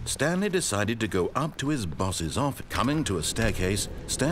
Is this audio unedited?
no; 1 cut; at 2.6 s

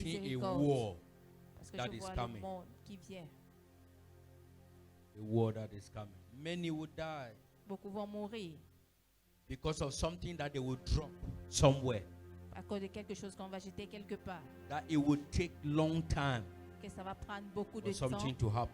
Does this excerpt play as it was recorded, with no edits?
no; 2 cuts; at 1.4 s, 7.9 s

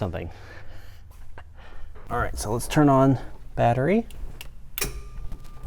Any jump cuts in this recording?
yes; 1 cut; at 2.0 s

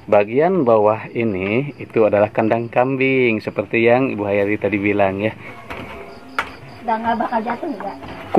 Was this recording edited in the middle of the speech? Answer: yes; 1 cut; at 5.5 s

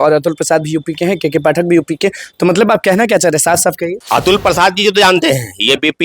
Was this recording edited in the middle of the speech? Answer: yes; 1 cut; at 4.0 s

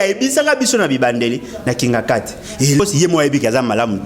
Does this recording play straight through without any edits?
no; 1 cut; at 2.8 s

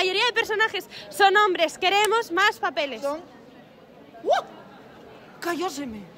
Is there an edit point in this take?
no; 0 cuts

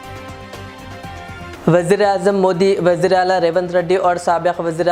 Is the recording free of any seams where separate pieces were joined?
no; 1 cut; at 1.5 s

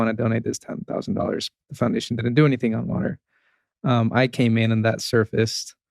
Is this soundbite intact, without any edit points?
yes; 0 cuts

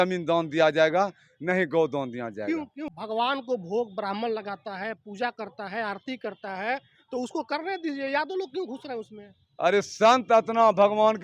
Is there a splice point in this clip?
yes; 1 cut; at 2.8 s

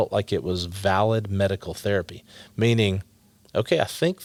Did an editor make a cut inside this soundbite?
no; 0 cuts

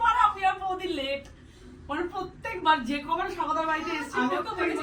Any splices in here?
no; 0 cuts

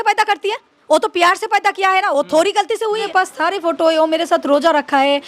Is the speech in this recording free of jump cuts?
no; 1 cut; at 3.1 s

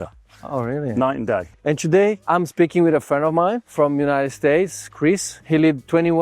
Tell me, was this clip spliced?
yes; 1 cut; at 1.6 s

